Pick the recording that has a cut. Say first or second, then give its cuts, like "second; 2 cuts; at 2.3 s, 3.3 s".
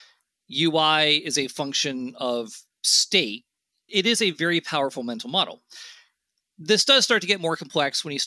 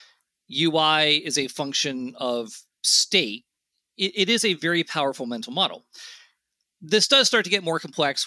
first; 1 cut; at 3.9 s